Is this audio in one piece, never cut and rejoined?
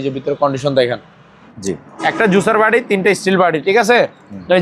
no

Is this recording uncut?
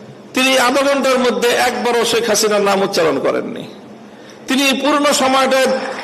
yes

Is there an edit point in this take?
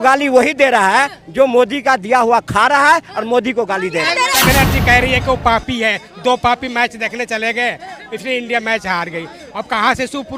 yes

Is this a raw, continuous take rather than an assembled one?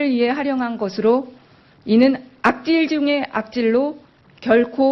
yes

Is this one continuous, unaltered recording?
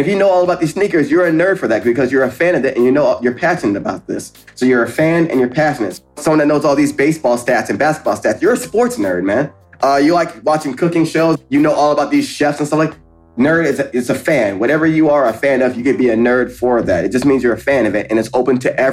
no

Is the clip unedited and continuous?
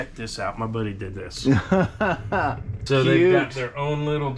no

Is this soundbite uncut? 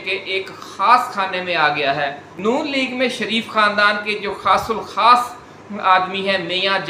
no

